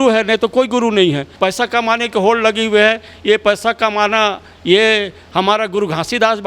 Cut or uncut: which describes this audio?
cut